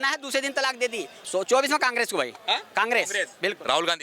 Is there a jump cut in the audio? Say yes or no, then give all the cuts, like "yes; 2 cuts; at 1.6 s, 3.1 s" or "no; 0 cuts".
yes; 1 cut; at 1.1 s